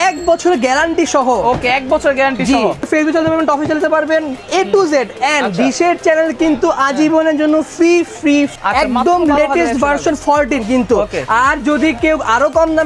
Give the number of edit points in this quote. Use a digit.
2